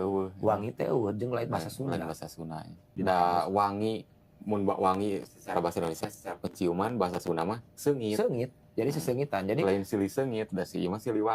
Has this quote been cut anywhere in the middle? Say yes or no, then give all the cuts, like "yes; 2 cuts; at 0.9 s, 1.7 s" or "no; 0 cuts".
yes; 1 cut; at 2.8 s